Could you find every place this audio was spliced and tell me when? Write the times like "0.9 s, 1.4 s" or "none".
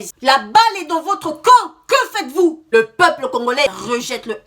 2.6 s